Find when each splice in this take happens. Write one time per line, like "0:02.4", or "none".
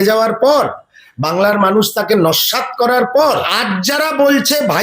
0:03.4